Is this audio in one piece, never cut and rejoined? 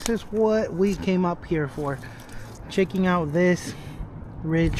yes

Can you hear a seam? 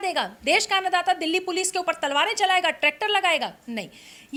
no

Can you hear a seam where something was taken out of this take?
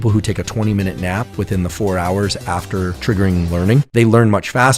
yes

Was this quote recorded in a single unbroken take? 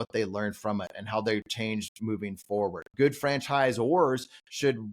no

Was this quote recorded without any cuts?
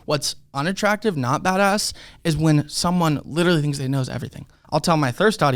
no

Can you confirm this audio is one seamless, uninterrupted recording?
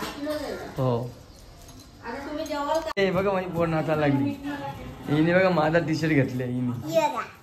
no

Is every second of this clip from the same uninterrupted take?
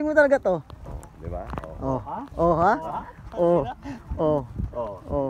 yes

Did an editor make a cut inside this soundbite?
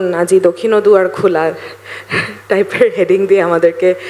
no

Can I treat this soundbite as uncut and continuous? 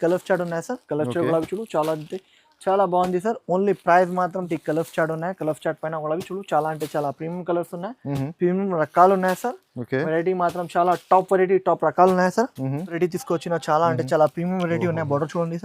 no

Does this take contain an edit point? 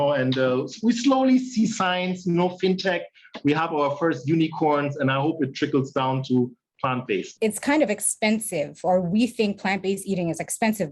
yes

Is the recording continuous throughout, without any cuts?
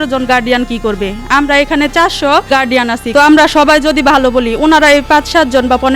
yes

